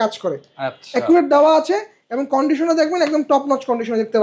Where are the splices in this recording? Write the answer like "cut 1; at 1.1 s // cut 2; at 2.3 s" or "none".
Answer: none